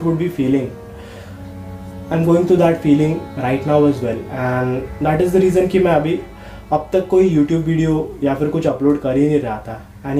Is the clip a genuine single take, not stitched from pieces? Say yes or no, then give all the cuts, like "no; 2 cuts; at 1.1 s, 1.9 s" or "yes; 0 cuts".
yes; 0 cuts